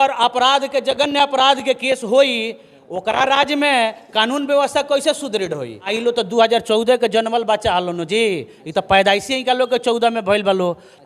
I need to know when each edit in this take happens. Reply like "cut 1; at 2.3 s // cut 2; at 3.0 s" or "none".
cut 1; at 6.0 s